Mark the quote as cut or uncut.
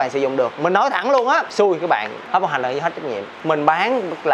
cut